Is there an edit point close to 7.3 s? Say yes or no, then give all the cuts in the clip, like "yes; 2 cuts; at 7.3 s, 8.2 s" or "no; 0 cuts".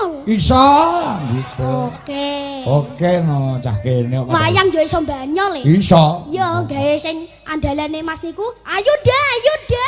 no; 0 cuts